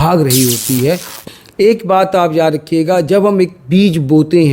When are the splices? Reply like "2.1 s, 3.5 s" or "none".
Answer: 1.1 s

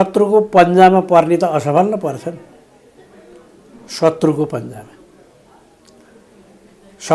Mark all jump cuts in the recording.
none

